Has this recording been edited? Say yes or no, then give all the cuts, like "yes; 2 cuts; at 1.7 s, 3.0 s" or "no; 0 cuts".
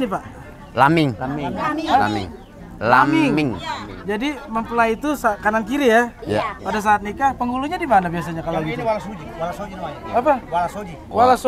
no; 0 cuts